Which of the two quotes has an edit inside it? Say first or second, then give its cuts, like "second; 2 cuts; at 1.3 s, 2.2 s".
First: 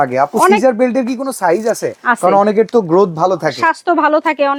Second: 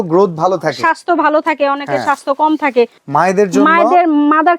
second; 1 cut; at 3.0 s